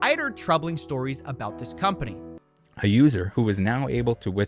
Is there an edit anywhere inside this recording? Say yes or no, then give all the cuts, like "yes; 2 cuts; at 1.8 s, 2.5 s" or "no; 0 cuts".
yes; 1 cut; at 2.1 s